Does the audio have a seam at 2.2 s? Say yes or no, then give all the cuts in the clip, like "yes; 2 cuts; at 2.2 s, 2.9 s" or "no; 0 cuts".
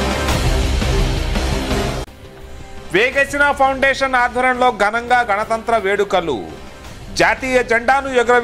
yes; 1 cut; at 2.2 s